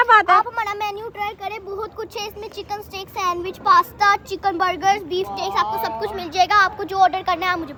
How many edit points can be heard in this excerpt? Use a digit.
0